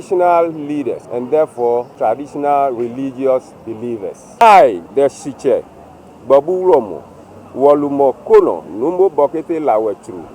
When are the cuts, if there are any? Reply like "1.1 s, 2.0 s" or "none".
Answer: 1.0 s, 1.9 s, 4.4 s